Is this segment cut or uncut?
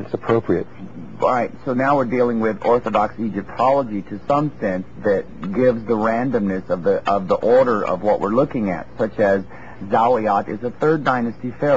cut